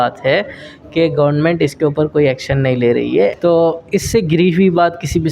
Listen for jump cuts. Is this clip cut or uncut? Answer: cut